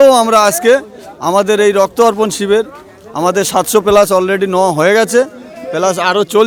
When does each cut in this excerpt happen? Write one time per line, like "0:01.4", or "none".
none